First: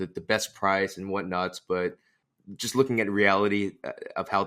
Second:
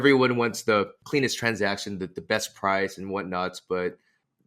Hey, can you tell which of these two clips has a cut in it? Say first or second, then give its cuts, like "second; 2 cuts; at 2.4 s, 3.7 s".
second; 1 cut; at 1.0 s